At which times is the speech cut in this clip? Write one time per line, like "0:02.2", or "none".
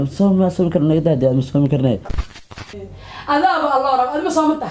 0:02.3